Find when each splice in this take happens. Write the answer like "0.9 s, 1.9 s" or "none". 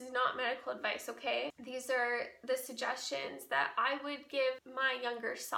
1.6 s, 4.6 s